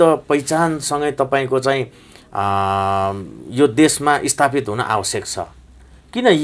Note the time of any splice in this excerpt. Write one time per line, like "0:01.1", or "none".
none